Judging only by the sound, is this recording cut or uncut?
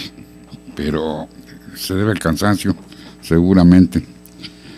cut